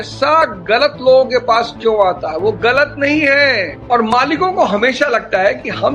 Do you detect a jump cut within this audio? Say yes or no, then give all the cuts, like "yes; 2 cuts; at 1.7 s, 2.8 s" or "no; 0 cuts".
yes; 1 cut; at 3.7 s